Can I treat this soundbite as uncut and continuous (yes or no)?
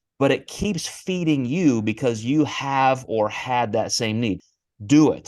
no